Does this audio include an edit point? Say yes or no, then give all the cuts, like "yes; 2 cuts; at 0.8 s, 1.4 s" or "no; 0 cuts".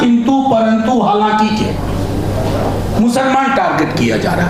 no; 0 cuts